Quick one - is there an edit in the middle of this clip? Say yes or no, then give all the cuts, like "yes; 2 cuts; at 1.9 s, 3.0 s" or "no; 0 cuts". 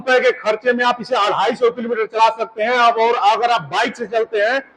no; 0 cuts